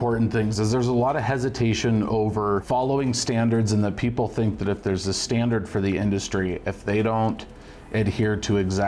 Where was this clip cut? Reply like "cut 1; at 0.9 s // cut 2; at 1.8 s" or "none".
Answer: cut 1; at 2.6 s